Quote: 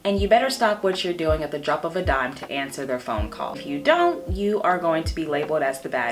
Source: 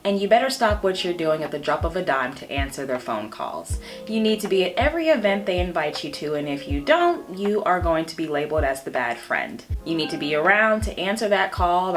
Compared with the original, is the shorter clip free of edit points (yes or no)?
no